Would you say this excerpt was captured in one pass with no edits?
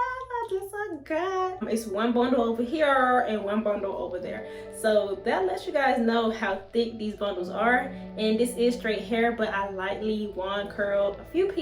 no; 1 cut; at 1.6 s

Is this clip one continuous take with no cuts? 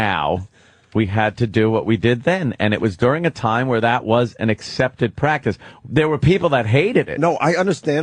yes; 0 cuts

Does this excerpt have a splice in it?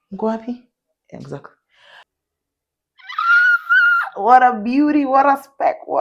yes; 1 cut; at 2.0 s

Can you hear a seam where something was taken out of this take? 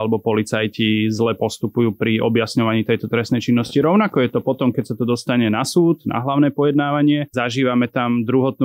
yes; 1 cut; at 7.3 s

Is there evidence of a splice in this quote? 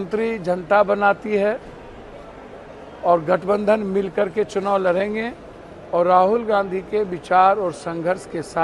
no; 0 cuts

